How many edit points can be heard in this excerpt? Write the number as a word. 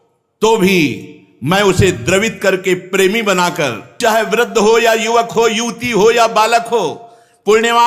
one